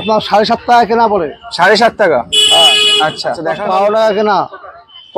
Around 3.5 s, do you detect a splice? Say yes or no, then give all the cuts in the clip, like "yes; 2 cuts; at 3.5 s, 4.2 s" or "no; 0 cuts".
yes; 1 cut; at 3.5 s